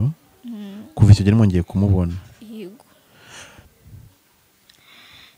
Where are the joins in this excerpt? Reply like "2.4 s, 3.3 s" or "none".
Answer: 3.6 s